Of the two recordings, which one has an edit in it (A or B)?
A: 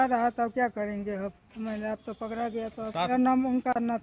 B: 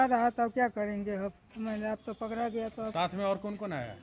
A